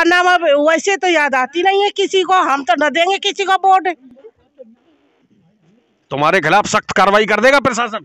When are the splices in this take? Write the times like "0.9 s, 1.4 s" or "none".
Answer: none

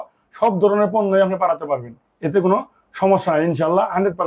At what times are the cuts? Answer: none

